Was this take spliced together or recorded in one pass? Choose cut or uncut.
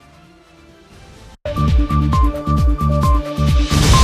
uncut